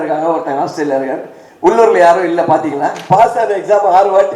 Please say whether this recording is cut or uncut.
cut